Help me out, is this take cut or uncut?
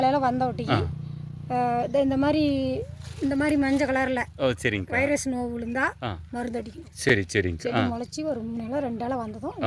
uncut